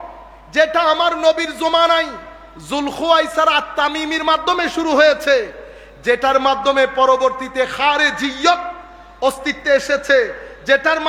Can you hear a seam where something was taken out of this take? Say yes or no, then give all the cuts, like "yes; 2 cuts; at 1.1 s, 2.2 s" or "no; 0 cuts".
no; 0 cuts